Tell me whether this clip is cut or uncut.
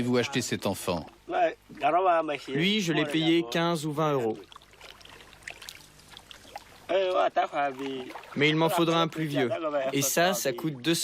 cut